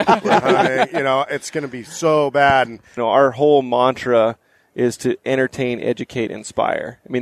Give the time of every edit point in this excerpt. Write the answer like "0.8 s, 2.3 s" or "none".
2.8 s